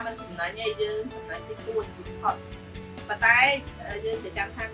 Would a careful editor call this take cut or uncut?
uncut